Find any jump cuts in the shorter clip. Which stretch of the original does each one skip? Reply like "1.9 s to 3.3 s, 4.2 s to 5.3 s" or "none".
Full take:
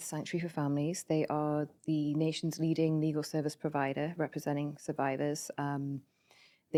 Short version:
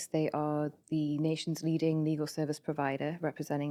none